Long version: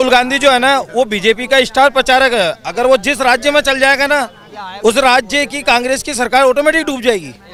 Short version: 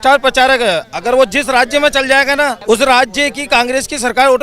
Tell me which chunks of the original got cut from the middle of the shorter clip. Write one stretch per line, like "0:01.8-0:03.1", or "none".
0:04.3-0:04.7